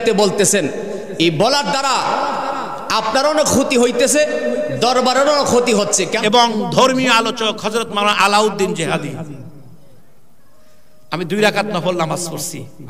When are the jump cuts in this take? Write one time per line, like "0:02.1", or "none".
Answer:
0:06.1